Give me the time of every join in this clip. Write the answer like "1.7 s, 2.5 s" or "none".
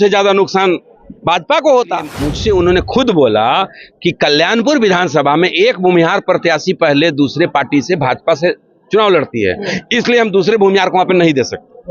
2.3 s